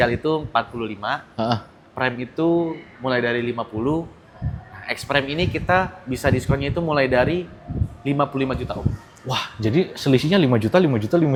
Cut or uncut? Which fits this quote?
uncut